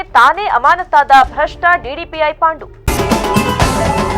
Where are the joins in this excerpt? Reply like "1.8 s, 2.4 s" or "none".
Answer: 2.7 s